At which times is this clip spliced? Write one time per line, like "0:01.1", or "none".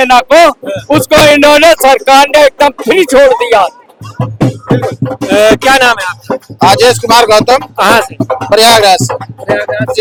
none